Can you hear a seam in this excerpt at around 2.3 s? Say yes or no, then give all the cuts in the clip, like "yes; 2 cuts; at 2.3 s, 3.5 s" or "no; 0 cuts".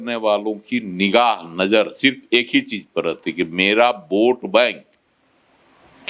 no; 0 cuts